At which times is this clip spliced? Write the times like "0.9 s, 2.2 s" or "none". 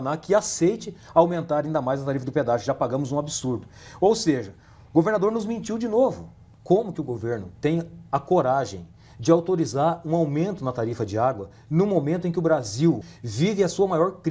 6.5 s, 13.1 s